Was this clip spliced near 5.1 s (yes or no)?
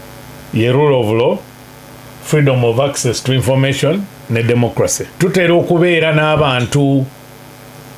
yes